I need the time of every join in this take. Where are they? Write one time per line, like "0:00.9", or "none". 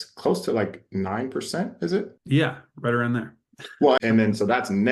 0:02.1
0:04.0